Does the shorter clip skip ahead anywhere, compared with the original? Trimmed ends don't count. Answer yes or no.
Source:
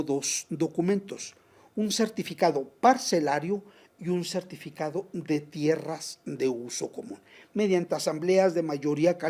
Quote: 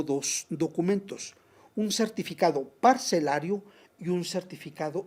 no